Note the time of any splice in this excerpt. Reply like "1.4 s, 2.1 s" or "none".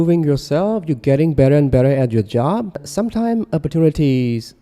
2.9 s

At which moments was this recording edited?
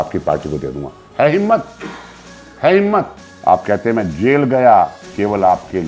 3.2 s

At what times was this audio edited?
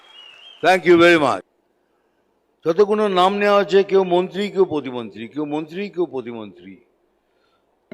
1.5 s

